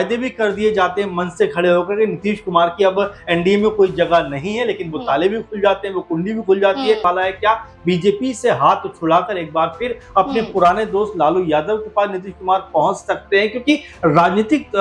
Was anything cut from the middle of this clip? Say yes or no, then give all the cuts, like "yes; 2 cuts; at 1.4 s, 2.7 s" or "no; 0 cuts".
yes; 1 cut; at 7.0 s